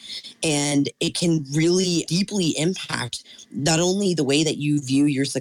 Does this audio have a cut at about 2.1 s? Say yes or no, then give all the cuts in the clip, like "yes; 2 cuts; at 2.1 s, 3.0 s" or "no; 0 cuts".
yes; 1 cut; at 2.1 s